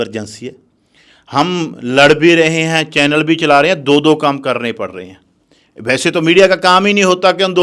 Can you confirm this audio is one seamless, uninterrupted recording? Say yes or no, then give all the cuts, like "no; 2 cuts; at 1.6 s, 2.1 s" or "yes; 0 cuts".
yes; 0 cuts